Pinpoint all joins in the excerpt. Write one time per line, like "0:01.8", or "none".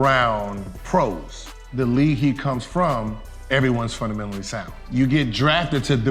0:01.4